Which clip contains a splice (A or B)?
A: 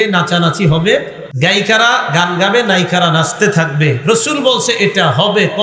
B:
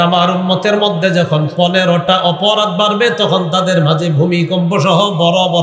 A